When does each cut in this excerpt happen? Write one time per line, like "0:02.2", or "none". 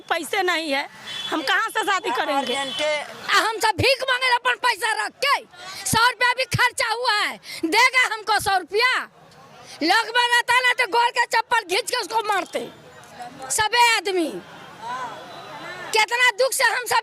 0:03.1